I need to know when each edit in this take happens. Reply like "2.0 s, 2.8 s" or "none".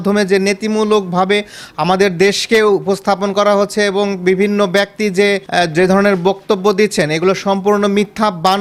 none